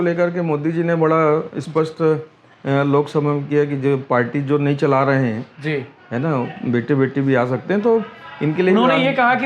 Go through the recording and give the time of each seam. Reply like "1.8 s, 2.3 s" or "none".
none